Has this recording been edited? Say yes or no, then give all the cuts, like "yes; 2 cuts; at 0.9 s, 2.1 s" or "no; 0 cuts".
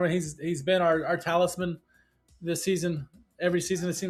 no; 0 cuts